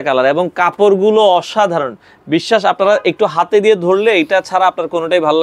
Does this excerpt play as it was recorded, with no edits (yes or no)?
yes